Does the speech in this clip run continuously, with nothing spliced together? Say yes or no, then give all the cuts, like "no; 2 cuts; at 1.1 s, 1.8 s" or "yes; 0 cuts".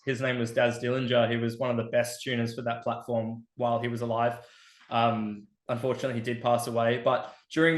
yes; 0 cuts